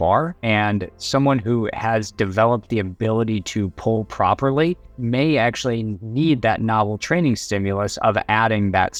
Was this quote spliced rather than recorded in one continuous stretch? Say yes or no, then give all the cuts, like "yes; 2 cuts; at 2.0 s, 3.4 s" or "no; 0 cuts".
no; 0 cuts